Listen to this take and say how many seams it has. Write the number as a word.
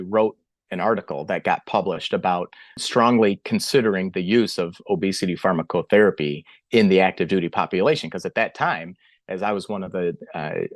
one